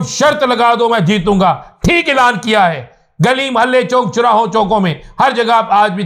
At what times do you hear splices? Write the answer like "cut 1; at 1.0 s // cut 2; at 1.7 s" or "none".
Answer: none